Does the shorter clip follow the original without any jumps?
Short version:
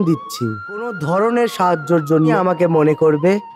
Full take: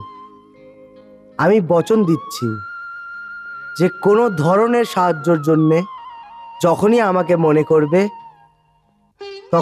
no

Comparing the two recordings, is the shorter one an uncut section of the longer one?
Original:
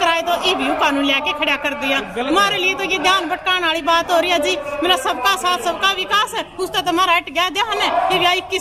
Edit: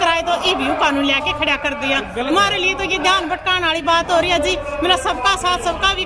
yes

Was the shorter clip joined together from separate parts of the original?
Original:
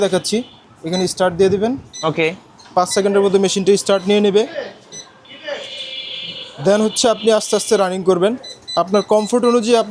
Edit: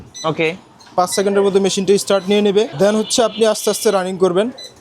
yes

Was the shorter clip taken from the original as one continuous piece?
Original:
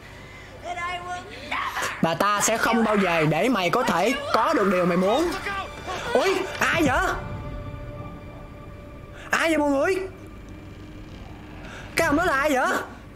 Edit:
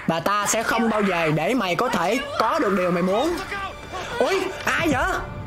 yes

